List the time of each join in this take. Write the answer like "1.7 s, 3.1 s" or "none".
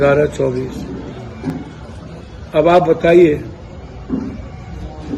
none